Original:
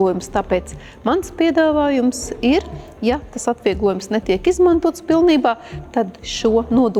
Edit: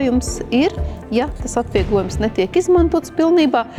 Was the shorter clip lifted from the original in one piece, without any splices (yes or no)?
yes